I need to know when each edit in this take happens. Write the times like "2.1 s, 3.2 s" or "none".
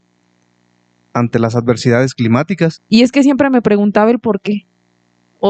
2.8 s